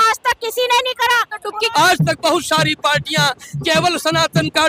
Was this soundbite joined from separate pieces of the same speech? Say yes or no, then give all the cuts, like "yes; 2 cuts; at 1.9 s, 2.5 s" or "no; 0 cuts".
yes; 1 cut; at 1.6 s